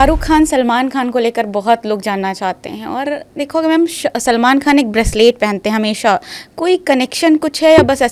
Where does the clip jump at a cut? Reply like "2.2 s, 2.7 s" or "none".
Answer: none